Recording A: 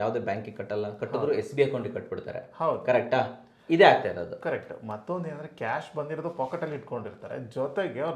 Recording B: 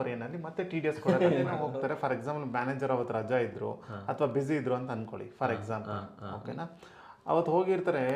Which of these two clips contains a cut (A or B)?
B